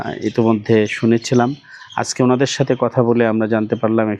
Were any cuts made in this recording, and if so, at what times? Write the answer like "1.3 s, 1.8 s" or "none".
none